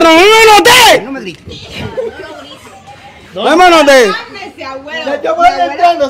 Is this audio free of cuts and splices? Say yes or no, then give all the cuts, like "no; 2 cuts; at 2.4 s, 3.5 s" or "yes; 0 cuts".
yes; 0 cuts